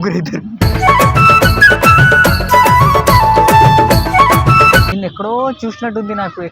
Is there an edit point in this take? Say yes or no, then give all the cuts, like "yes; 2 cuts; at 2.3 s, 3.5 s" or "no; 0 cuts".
yes; 1 cut; at 4.9 s